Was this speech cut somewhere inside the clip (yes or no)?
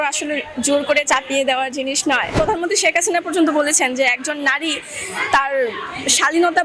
yes